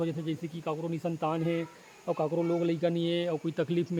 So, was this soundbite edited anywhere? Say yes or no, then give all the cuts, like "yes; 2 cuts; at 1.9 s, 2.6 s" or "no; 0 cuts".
no; 0 cuts